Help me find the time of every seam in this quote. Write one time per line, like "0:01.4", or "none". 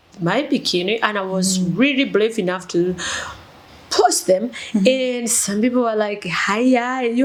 none